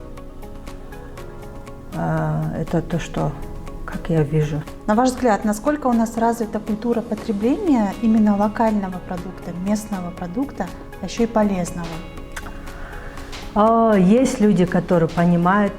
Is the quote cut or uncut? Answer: cut